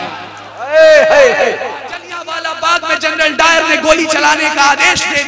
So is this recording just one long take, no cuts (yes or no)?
no